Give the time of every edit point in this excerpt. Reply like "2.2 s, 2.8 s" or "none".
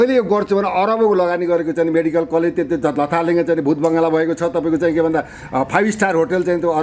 none

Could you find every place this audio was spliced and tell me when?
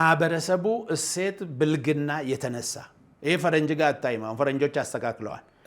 none

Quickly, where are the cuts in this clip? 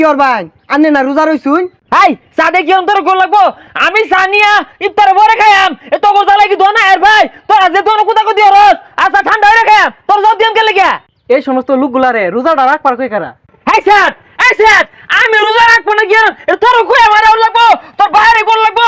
none

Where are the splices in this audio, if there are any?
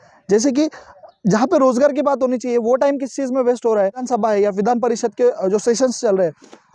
4.1 s

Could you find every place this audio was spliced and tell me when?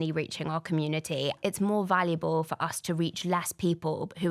1.4 s

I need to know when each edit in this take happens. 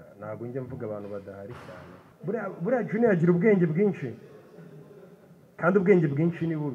2.0 s

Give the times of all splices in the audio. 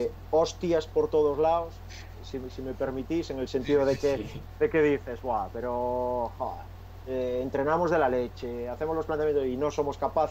none

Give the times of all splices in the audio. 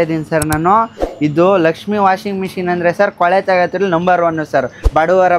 none

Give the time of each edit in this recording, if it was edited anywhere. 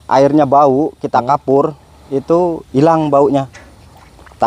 none

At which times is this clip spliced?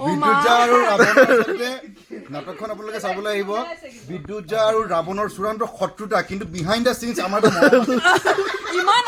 none

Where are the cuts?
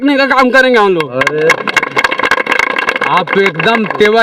none

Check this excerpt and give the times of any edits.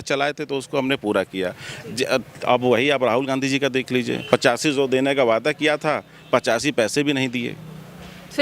none

